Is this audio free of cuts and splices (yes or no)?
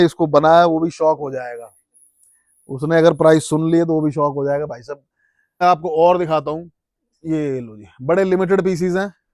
no